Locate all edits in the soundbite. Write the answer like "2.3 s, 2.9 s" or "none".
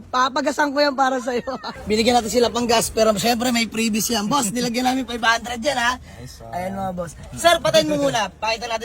1.7 s